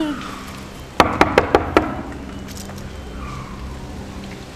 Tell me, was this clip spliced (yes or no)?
no